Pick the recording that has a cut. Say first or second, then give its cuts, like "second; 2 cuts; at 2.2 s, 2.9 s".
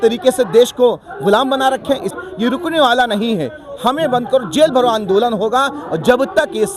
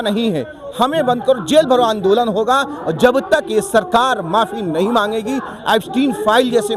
first; 1 cut; at 2.1 s